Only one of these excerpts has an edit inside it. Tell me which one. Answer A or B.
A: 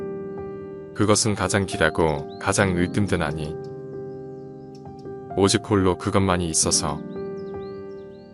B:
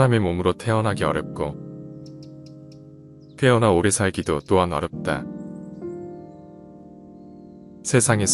A